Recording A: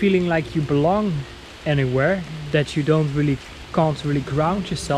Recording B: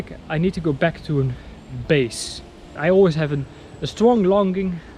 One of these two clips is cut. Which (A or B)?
B